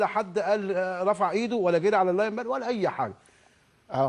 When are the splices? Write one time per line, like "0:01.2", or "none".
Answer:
0:01.0